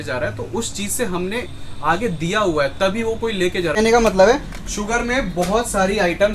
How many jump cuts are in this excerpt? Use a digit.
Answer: 1